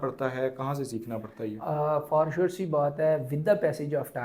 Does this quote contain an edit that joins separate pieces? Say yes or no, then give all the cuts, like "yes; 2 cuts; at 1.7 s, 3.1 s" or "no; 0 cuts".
no; 0 cuts